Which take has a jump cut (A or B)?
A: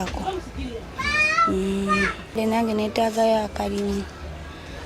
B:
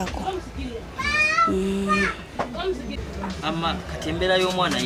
A